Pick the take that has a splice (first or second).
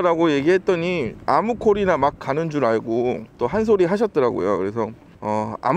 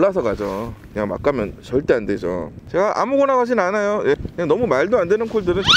second